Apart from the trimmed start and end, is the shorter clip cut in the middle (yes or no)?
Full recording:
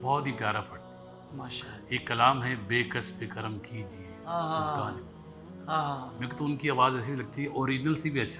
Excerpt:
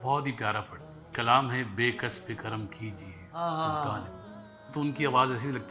yes